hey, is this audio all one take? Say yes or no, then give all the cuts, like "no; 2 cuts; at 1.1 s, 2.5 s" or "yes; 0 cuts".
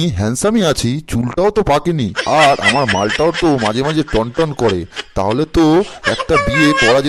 yes; 0 cuts